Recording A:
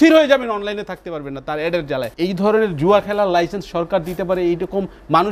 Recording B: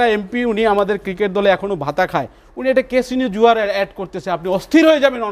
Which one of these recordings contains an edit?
A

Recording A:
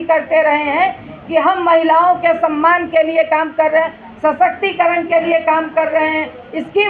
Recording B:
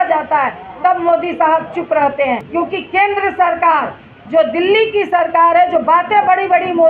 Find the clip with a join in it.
B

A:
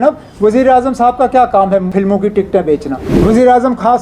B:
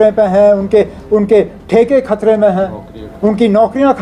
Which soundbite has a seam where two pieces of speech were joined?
A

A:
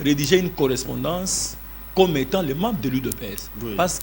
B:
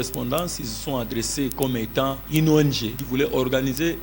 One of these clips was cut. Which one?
B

